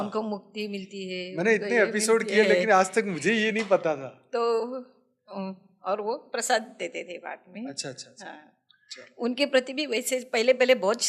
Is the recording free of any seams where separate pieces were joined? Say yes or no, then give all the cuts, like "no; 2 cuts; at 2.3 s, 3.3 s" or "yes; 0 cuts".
yes; 0 cuts